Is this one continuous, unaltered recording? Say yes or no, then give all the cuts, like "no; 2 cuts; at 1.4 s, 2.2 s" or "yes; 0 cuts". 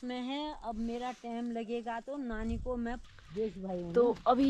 no; 1 cut; at 3.0 s